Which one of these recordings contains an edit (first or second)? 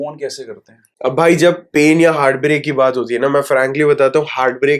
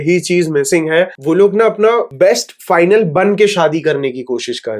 second